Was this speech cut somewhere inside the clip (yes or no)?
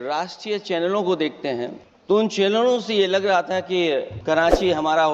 yes